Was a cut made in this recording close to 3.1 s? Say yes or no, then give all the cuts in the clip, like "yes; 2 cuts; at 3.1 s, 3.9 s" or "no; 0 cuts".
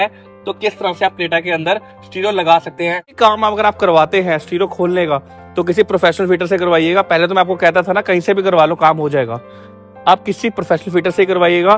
yes; 1 cut; at 3.1 s